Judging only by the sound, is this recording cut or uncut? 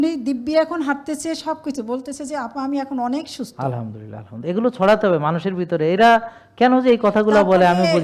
uncut